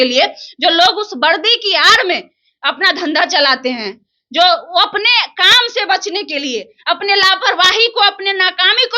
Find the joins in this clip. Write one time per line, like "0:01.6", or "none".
none